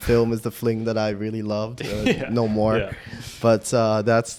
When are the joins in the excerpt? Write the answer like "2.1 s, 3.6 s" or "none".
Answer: none